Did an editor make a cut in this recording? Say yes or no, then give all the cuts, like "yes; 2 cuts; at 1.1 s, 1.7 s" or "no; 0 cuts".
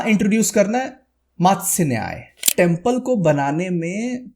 yes; 1 cut; at 2.5 s